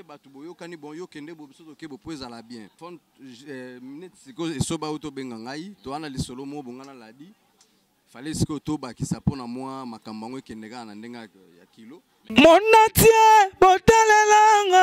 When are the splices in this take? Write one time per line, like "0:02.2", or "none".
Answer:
0:02.8
0:12.2